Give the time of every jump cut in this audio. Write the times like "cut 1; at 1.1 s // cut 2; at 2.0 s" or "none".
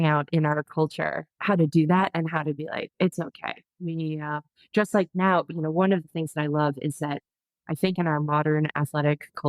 cut 1; at 1.3 s